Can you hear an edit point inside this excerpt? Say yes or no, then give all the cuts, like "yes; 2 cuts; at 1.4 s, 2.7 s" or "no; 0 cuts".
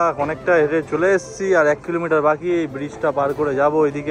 no; 0 cuts